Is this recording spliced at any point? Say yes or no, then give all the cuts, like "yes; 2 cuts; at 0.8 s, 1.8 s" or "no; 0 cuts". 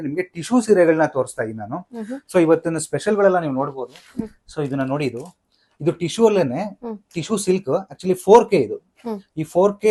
no; 0 cuts